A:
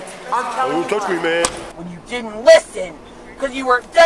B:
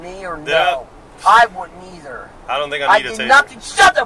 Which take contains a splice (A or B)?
A